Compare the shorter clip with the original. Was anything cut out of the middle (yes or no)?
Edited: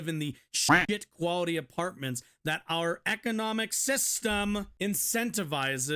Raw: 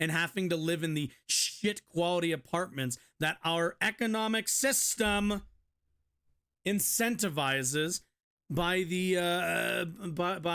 yes